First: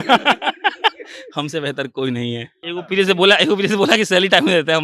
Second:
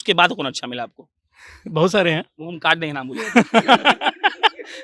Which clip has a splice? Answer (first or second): first